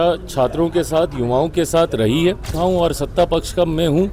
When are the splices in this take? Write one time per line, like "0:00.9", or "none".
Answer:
0:02.5